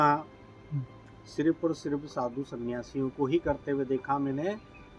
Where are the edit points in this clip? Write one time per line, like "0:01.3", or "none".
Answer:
none